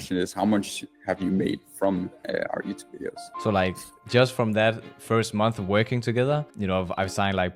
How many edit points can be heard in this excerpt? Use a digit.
3